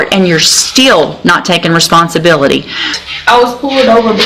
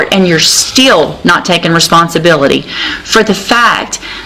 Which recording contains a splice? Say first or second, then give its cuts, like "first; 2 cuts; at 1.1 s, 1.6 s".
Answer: first; 1 cut; at 2.9 s